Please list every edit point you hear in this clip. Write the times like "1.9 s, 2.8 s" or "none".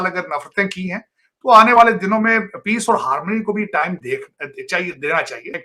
none